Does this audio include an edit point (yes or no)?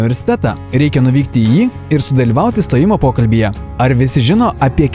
no